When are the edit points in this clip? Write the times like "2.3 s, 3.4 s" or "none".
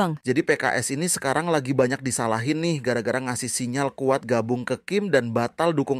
none